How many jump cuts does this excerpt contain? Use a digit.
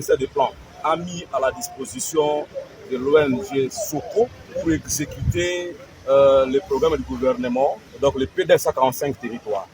3